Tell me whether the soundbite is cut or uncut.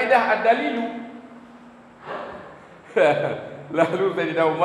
cut